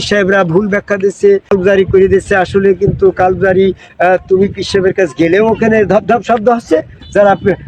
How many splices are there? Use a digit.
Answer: 1